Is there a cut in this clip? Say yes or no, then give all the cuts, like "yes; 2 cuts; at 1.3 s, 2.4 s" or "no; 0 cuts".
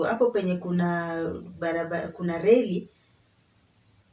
no; 0 cuts